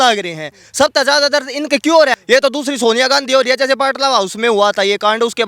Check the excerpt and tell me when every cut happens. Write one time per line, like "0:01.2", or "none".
0:02.2